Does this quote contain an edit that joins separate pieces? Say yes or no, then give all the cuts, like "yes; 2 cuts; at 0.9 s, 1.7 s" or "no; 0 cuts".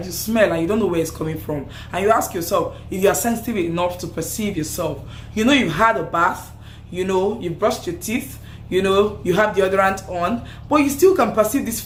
no; 0 cuts